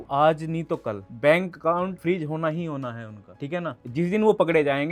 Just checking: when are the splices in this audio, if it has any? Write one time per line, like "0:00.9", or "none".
none